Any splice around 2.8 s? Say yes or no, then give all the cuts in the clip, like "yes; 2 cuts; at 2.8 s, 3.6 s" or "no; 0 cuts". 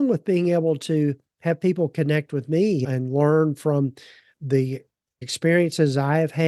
yes; 2 cuts; at 2.8 s, 5.3 s